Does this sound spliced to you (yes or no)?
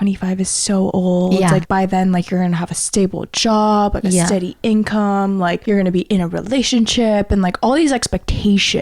yes